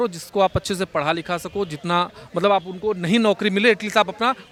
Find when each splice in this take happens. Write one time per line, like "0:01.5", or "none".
none